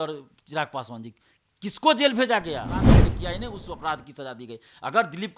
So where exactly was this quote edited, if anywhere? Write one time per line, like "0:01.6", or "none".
0:02.8